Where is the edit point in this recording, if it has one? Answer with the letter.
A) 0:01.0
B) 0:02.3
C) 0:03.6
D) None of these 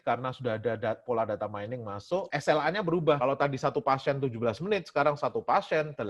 B